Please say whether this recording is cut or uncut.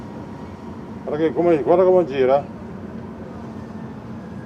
uncut